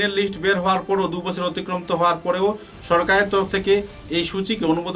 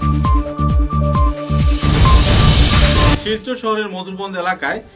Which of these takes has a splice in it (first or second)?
second